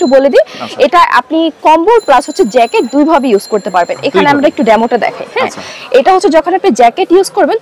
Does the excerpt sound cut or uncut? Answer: uncut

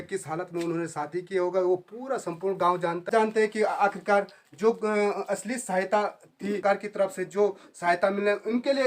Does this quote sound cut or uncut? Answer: cut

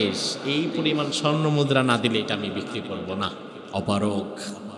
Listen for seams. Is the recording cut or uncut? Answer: cut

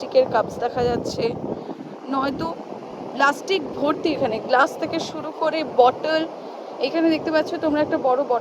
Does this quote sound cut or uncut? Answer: uncut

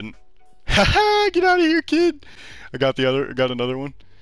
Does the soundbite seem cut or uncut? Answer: uncut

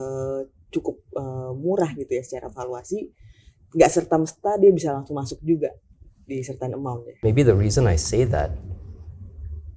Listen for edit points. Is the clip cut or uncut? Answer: cut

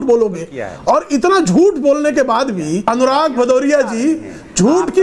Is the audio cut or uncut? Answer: cut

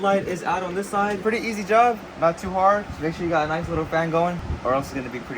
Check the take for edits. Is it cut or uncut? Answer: cut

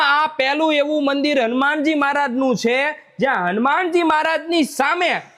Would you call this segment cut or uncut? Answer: uncut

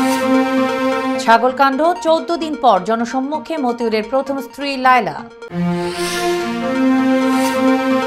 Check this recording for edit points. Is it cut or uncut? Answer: cut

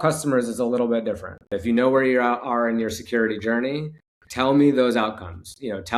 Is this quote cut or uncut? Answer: cut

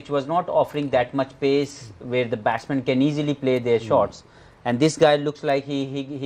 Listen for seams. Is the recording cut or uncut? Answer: uncut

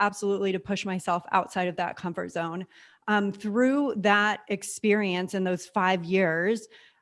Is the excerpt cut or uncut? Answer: uncut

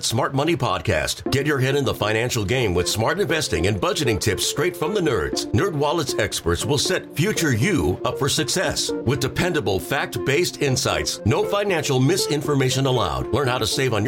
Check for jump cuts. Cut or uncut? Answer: uncut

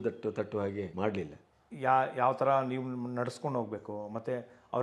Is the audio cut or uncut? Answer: cut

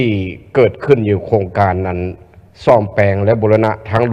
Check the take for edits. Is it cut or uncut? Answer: uncut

